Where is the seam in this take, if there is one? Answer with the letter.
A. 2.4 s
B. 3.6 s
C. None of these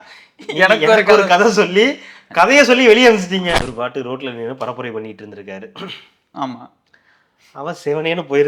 B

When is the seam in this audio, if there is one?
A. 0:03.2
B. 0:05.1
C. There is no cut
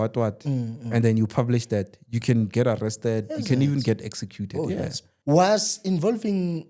B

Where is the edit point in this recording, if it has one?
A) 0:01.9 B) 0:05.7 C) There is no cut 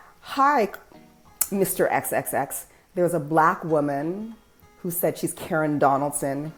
C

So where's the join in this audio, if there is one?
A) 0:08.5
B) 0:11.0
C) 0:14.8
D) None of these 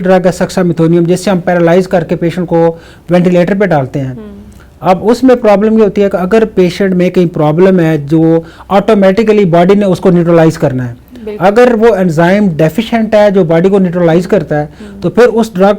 D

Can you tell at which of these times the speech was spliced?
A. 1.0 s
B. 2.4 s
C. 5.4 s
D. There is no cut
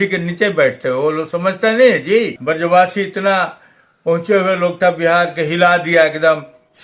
B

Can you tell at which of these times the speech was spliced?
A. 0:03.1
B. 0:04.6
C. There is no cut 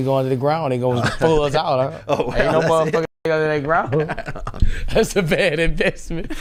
C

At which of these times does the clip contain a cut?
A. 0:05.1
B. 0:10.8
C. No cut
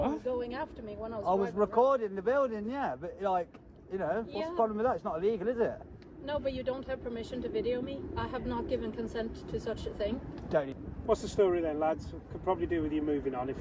B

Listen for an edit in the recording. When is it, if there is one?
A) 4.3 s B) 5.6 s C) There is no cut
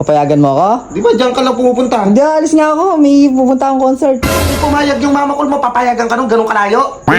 A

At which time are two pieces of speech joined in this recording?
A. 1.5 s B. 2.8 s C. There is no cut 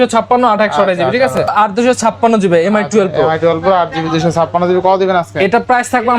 A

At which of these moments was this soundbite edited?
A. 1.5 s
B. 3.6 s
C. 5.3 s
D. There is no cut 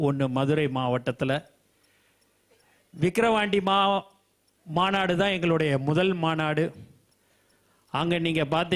D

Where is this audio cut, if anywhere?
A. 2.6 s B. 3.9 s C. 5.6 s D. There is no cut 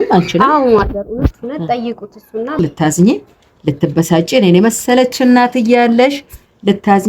A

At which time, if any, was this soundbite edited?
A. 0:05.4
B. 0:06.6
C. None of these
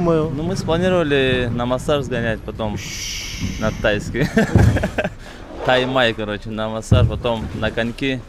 C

